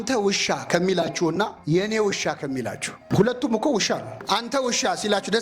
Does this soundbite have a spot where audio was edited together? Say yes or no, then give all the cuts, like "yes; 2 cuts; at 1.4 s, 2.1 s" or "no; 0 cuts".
yes; 3 cuts; at 1.6 s, 3.0 s, 4.3 s